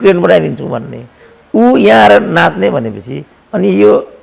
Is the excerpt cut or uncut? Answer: uncut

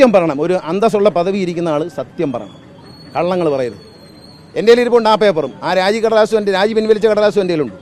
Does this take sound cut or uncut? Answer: uncut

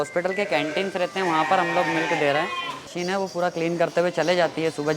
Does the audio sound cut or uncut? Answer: cut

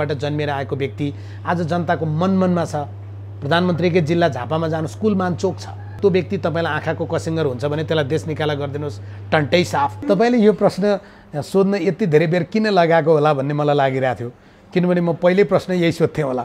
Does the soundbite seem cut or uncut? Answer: cut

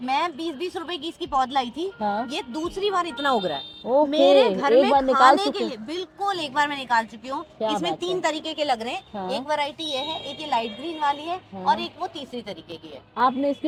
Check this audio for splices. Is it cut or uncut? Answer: uncut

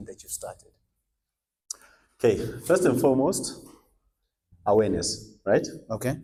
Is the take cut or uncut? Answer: uncut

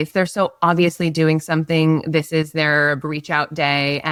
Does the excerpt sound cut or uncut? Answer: uncut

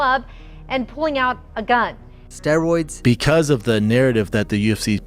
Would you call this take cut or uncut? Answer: cut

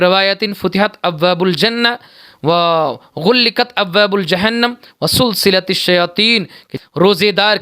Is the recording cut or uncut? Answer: cut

